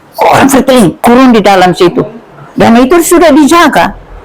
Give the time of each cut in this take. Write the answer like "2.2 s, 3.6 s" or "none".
1.0 s